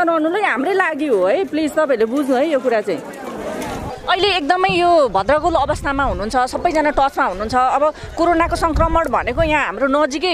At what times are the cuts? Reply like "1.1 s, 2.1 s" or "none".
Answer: 3.9 s